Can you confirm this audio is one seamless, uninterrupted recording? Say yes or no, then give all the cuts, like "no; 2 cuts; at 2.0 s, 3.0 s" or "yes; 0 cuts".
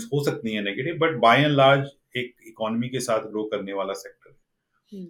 yes; 0 cuts